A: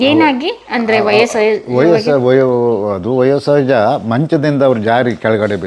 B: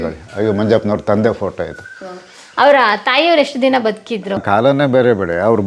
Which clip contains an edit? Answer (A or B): B